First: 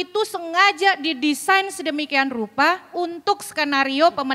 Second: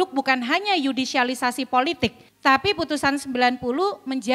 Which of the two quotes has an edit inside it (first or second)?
second